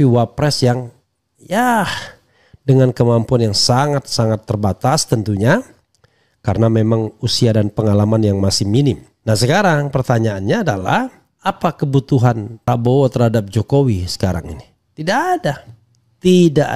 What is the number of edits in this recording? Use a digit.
3